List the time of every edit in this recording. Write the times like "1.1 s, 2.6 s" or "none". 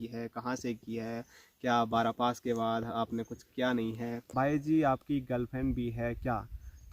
4.3 s